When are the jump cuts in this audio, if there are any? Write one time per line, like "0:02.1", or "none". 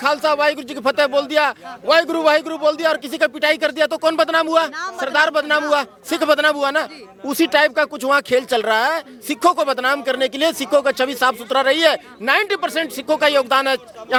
none